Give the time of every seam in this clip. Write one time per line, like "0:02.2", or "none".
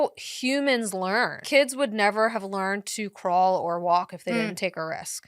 0:01.4